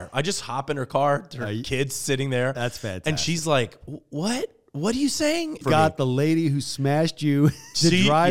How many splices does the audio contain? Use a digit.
1